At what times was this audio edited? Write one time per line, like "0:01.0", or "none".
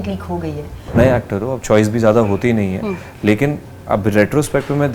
0:00.9